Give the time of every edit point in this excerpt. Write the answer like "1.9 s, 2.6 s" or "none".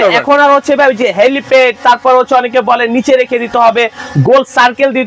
none